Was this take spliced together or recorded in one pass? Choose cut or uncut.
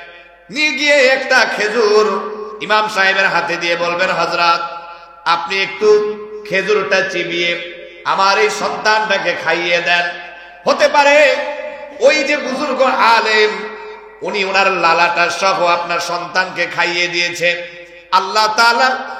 uncut